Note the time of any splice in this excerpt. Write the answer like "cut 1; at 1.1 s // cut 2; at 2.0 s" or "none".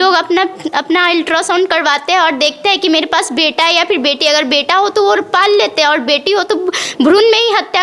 none